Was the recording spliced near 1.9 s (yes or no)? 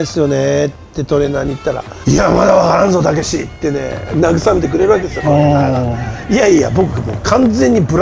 yes